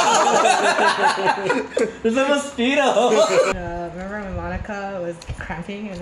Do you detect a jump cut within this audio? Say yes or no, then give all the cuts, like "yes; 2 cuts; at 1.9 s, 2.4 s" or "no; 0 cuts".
yes; 1 cut; at 3.5 s